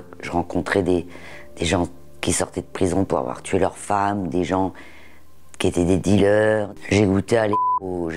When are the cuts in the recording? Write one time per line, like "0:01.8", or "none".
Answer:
none